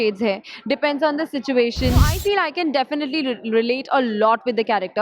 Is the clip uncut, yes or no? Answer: no